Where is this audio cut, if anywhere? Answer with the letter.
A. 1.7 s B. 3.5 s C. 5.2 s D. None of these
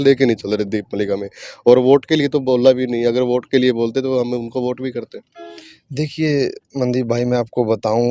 D